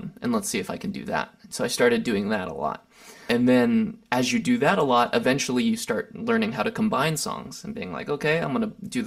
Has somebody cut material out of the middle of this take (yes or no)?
yes